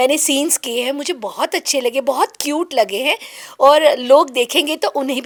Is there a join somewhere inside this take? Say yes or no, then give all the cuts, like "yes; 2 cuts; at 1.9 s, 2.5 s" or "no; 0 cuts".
no; 0 cuts